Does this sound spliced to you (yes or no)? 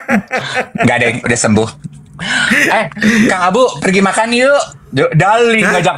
no